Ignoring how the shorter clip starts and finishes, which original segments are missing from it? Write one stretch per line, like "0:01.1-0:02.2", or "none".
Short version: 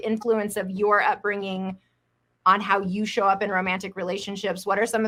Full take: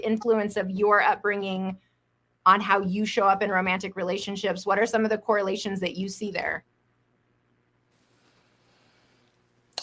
none